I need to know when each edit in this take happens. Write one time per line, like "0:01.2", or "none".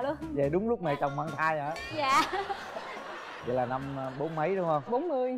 none